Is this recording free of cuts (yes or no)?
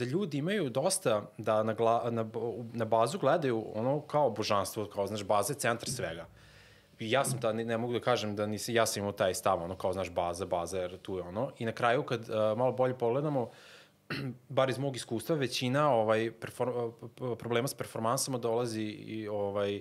yes